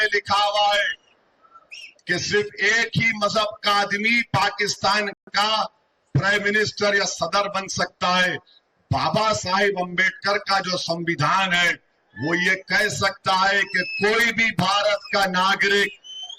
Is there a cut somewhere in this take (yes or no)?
no